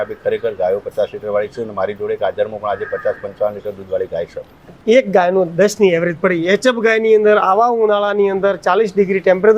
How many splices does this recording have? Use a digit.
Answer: 1